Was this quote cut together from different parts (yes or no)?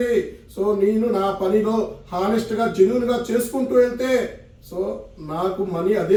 no